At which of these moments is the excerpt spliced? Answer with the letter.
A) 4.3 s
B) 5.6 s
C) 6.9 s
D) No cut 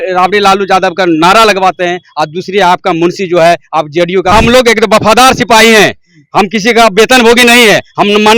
A